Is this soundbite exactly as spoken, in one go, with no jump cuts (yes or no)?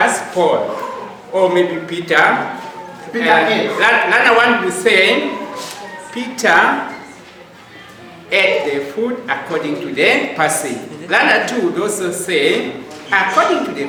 yes